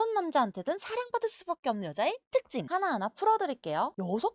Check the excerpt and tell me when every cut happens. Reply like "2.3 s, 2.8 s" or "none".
none